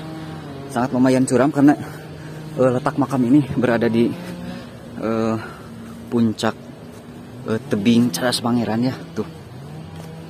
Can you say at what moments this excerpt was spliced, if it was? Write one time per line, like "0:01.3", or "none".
none